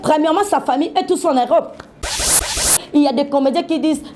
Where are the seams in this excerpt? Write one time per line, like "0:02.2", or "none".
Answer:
0:02.3